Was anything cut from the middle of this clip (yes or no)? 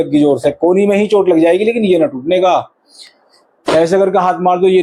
no